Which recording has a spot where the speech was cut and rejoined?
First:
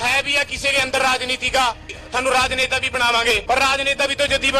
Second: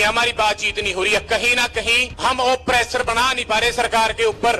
first; 2 cuts; at 1.8 s, 3.4 s

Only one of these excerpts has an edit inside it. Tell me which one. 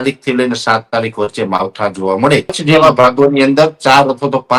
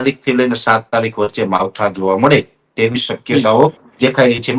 first; 1 cut; at 2.6 s

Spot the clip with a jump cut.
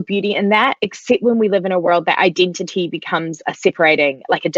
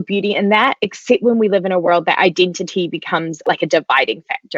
second; 1 cut; at 3.4 s

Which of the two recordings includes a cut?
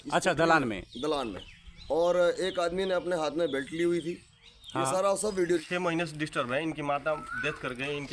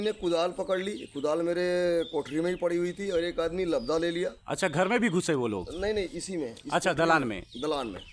first; 1 cut; at 5.6 s

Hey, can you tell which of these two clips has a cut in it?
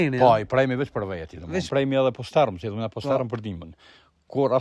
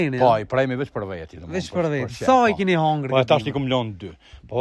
first; 1 cut; at 1.6 s

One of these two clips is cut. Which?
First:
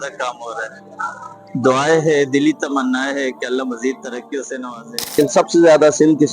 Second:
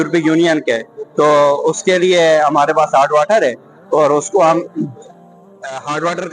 first; 1 cut; at 5.1 s

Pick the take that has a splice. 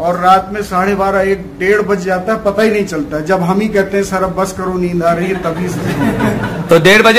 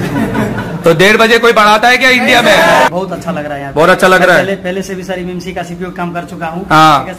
second; 1 cut; at 2.9 s

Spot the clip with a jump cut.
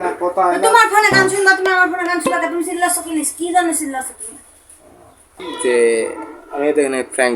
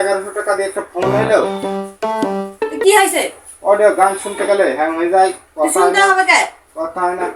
first; 1 cut; at 5.4 s

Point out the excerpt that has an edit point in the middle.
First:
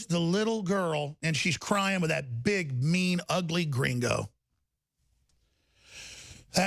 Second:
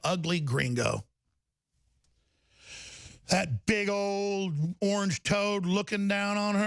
first; 1 cut; at 1.1 s

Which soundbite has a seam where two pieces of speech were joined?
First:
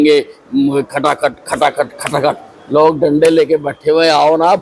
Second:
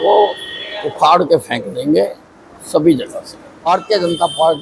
second; 1 cut; at 3.7 s

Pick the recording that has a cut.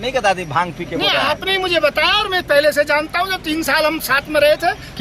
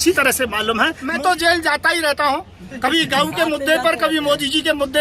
second; 1 cut; at 1.0 s

